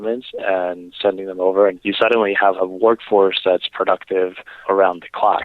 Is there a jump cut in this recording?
yes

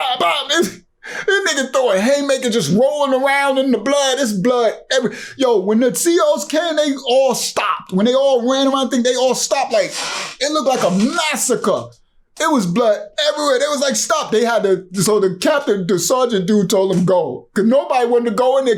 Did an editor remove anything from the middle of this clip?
no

